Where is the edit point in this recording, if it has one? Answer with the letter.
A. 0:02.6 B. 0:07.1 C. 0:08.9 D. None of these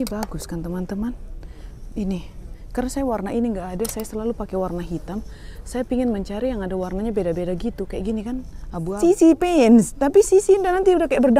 C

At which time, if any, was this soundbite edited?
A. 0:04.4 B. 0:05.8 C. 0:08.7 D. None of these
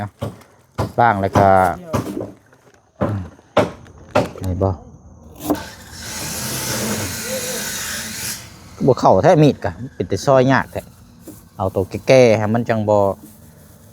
A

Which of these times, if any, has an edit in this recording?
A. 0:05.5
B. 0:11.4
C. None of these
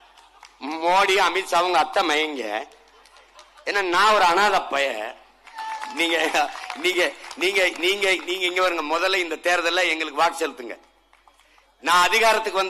A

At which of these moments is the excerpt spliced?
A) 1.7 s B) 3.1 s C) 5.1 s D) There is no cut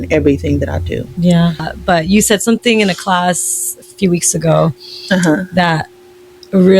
A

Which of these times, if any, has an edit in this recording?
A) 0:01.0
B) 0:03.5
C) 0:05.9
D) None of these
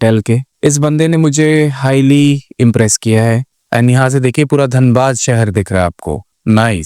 B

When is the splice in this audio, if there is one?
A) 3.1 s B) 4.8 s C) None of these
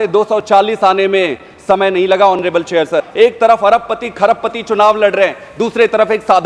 A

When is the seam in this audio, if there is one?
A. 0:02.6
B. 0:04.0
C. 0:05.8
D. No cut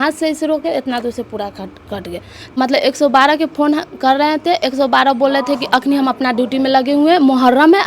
A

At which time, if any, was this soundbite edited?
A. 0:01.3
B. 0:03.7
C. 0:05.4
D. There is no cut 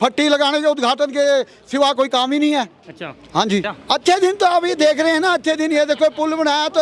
B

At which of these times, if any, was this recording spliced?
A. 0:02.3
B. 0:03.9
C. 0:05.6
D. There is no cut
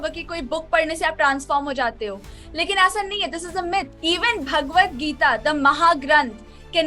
B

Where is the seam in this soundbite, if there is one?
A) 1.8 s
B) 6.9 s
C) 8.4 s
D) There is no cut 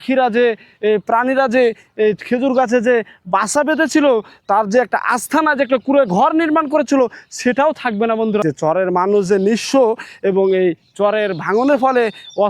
C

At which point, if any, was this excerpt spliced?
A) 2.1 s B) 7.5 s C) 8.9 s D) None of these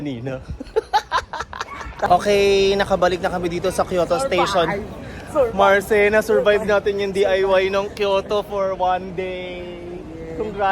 A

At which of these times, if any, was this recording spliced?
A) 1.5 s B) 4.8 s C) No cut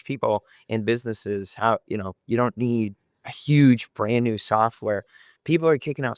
C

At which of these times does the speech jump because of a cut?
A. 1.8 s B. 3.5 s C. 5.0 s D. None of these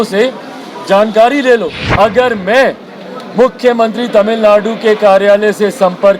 A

